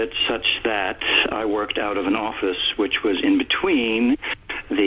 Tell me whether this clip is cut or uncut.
cut